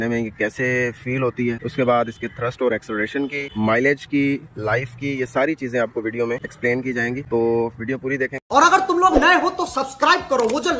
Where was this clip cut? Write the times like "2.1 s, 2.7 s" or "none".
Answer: 8.4 s